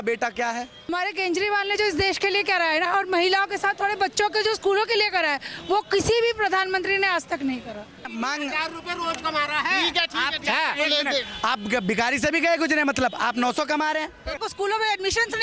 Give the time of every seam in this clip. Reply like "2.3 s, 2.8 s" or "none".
0.9 s, 8.1 s, 14.4 s

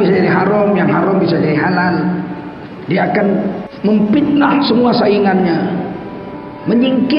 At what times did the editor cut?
3.7 s

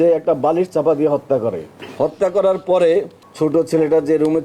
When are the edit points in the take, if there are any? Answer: 3.2 s

